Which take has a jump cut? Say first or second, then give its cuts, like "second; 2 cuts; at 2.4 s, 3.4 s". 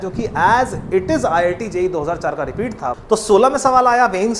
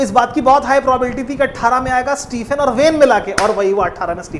first; 1 cut; at 3.0 s